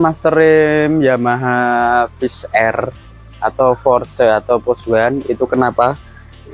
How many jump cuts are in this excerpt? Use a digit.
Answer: 0